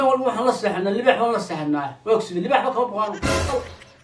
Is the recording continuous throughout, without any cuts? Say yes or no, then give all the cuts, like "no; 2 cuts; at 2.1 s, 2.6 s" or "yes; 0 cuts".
yes; 0 cuts